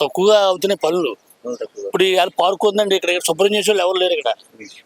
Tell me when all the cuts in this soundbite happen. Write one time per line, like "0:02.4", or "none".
none